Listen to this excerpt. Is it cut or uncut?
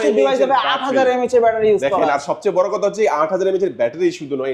uncut